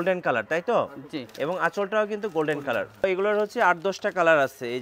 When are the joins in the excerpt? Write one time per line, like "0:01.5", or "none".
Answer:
0:03.0